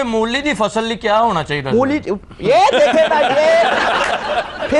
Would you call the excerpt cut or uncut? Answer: uncut